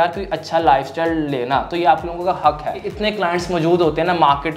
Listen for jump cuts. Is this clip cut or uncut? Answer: cut